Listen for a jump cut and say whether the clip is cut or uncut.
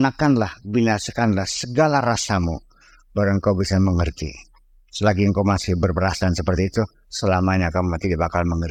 uncut